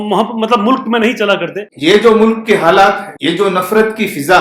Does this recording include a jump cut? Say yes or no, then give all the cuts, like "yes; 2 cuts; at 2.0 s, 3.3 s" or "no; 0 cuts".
yes; 2 cuts; at 1.7 s, 3.1 s